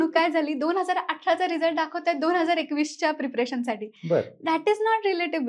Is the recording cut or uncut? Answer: uncut